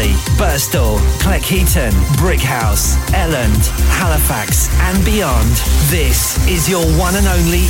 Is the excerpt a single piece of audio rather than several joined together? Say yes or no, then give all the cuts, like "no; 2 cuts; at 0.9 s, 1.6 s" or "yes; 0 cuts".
yes; 0 cuts